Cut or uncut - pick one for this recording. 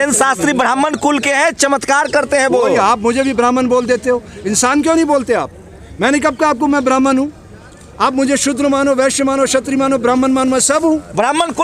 uncut